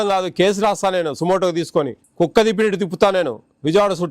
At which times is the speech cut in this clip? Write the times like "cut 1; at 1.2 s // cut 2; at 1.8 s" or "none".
cut 1; at 2.0 s